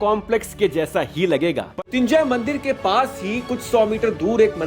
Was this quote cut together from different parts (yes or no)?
yes